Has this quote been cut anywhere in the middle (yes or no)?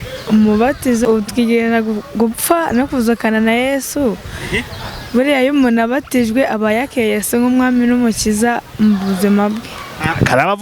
yes